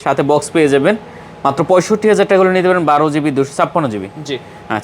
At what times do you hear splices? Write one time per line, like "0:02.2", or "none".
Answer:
none

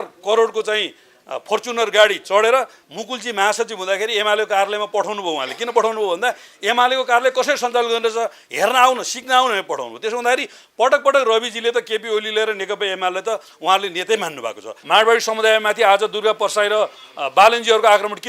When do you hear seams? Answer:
0:02.8
0:14.8

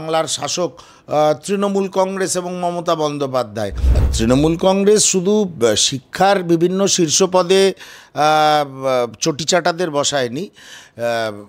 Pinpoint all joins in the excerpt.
0:04.0

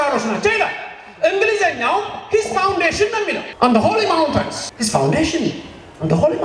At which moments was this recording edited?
0:03.4
0:04.6

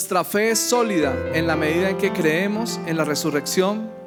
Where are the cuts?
none

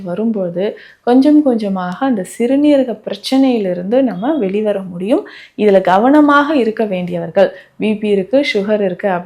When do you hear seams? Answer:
none

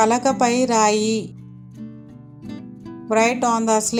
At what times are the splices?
none

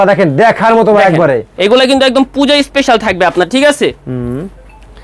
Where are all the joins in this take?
0:01.5

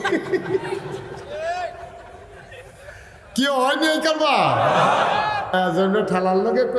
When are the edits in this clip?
0:05.5

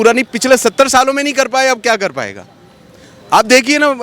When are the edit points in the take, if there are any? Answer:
none

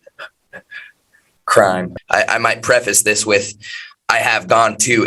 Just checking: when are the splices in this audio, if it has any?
0:01.9

